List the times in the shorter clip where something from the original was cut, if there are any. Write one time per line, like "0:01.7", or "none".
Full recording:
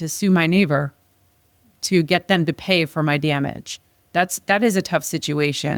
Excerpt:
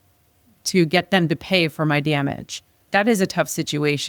0:02.8